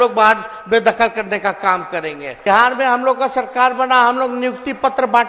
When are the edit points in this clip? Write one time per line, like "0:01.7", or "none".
0:02.4

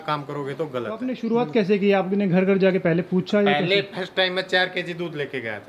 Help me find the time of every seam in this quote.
0:01.1

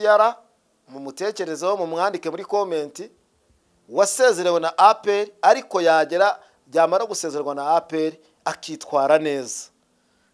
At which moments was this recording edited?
none

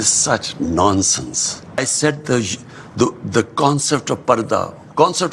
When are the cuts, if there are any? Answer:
0:01.8

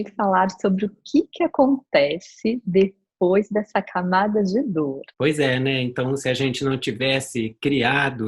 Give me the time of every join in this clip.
0:05.1

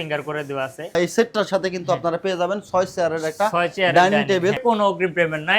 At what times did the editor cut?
0:01.0
0:04.6

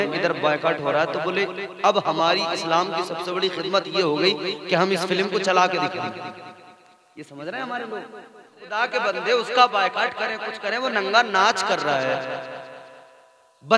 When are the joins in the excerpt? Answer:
0:08.7

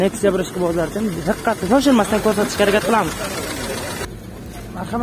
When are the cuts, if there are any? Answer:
0:04.0

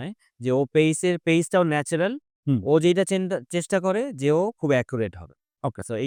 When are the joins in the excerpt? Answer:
none

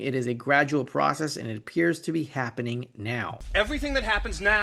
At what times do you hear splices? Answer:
0:03.4

